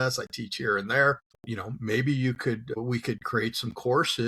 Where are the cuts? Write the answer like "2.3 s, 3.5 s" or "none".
1.3 s, 2.8 s